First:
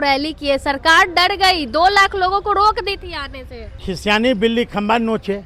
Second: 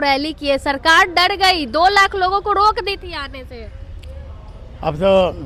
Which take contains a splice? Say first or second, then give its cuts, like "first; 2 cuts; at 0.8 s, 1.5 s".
first; 1 cut; at 3.8 s